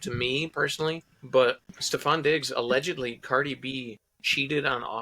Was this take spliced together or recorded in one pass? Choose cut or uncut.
cut